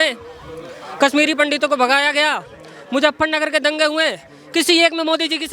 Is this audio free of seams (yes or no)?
yes